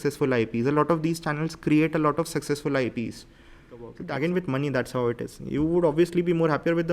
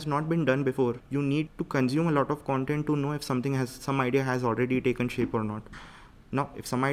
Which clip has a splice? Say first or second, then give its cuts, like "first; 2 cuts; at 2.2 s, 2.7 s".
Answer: first; 1 cut; at 3.8 s